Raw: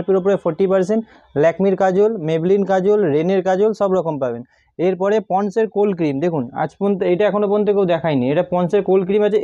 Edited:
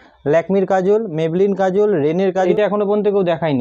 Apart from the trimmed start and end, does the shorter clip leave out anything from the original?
yes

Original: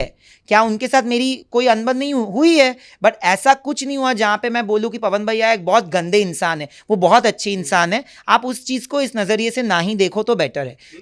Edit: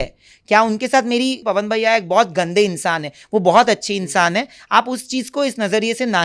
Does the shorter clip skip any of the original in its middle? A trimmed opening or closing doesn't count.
yes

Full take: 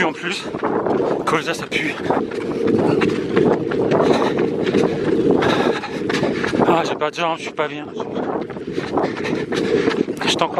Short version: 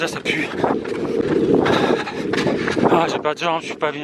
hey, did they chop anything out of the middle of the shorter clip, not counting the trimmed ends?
yes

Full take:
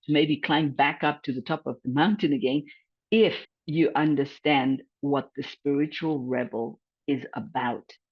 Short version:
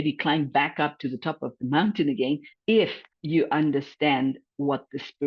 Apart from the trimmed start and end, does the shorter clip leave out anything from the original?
yes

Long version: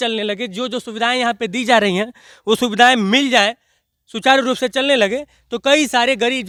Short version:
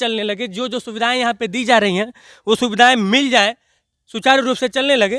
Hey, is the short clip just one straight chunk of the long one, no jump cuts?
yes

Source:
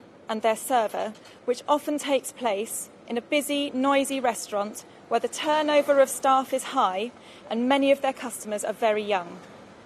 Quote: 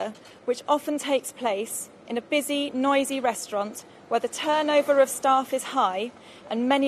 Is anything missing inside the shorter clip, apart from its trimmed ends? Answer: no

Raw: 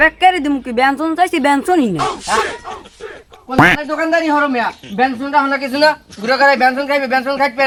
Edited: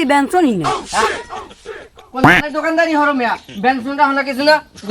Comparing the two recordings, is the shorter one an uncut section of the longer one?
yes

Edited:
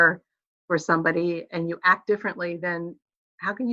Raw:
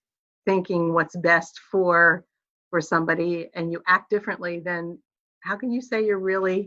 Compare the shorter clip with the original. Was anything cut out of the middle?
no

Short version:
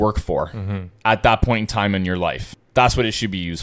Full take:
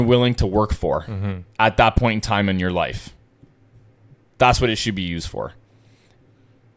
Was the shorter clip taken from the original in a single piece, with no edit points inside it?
no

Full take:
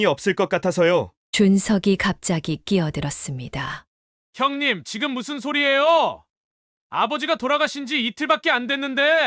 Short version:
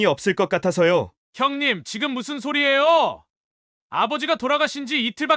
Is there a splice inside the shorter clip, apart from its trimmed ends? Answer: yes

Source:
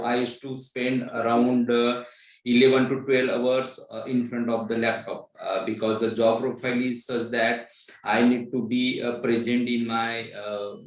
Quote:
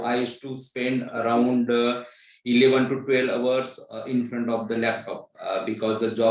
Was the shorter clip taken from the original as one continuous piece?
yes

